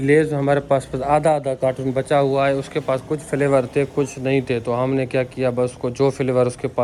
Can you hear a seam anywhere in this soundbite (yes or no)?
no